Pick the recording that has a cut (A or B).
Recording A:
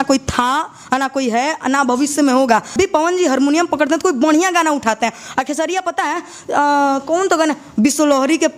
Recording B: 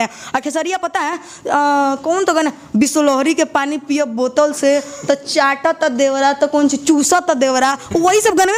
A